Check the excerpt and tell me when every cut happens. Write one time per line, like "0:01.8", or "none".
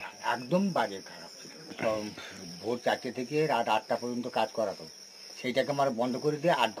0:01.7